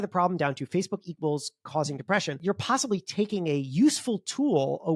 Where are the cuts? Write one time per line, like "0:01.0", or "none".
0:02.4